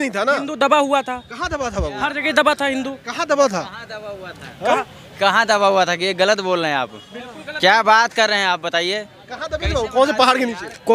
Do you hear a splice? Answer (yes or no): no